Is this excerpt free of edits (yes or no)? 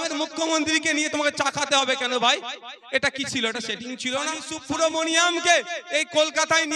no